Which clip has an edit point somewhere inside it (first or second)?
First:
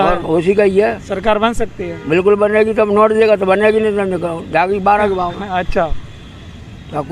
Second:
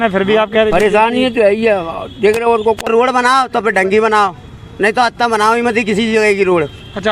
second